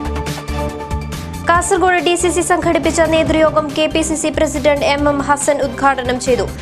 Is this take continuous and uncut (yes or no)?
no